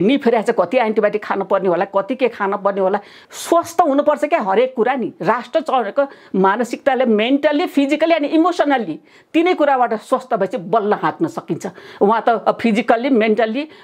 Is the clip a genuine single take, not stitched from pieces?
no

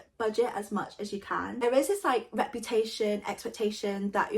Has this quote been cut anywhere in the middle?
yes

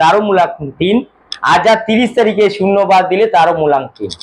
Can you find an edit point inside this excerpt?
no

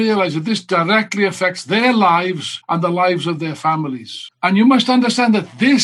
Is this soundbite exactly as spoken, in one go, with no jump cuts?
no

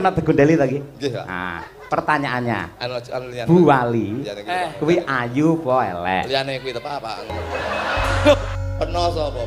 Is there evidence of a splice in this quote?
yes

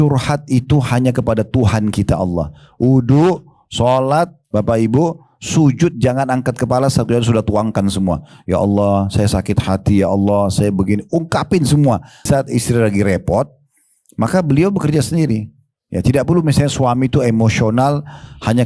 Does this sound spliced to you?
yes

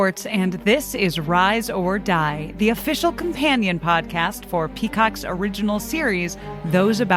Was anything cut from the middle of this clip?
no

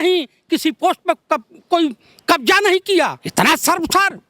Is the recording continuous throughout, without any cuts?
no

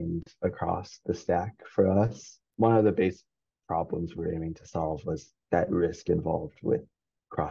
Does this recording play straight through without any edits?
yes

